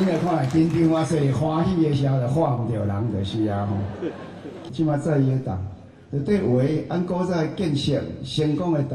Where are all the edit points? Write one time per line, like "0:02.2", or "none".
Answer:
0:04.6